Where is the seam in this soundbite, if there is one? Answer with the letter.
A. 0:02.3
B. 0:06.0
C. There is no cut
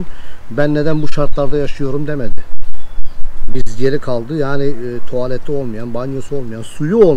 C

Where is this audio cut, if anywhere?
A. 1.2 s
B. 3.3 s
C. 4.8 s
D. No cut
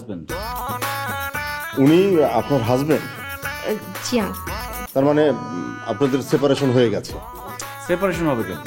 C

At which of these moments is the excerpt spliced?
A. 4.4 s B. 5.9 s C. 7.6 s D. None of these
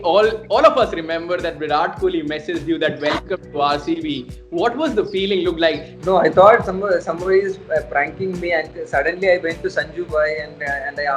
B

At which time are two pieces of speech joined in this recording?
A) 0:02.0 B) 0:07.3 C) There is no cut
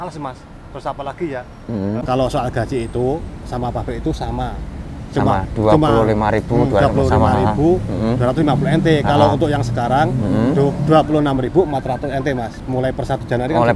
A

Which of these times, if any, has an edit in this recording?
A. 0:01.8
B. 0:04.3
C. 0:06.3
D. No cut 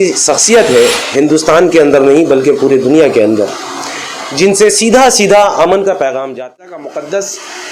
C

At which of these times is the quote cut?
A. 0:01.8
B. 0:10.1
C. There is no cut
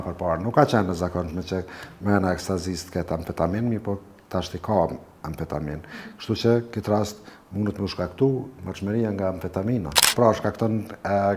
B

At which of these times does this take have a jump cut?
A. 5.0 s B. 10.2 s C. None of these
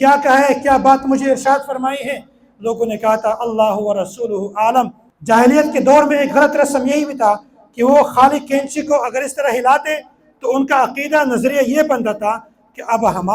A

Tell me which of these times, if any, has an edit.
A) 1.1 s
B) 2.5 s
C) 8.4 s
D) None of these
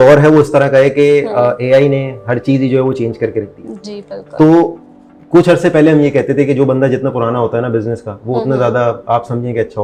D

